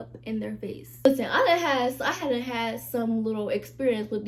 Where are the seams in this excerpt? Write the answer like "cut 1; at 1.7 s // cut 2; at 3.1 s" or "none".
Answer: cut 1; at 0.9 s